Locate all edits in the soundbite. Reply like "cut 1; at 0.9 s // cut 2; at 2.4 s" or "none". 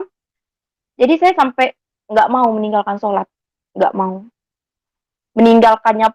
none